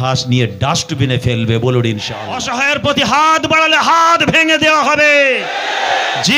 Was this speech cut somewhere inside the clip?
yes; 1 cut; at 2.4 s

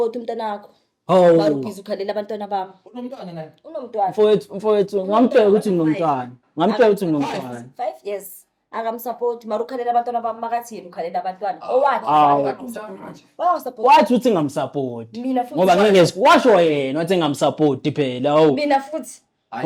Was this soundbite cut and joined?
no; 0 cuts

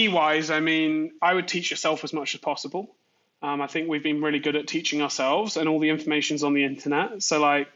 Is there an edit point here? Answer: yes; 1 cut; at 1.1 s

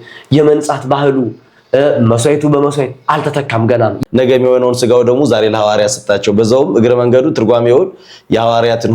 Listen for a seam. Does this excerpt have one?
yes; 1 cut; at 4.0 s

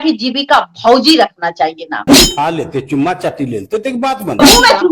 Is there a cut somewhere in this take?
yes; 1 cut; at 2.1 s

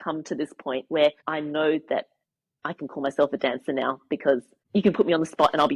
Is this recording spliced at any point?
yes; 2 cuts; at 1.2 s, 4.6 s

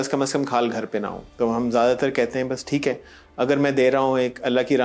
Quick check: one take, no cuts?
no; 1 cut; at 1.2 s

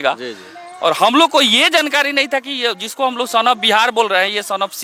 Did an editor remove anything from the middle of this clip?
no; 0 cuts

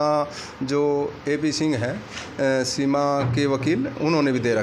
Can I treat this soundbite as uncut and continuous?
yes; 0 cuts

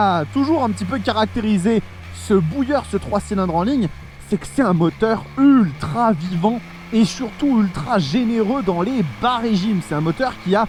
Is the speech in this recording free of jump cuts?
yes; 0 cuts

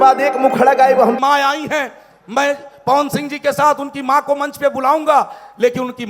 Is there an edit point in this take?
yes; 1 cut; at 1.2 s

